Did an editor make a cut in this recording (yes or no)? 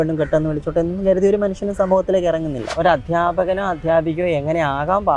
yes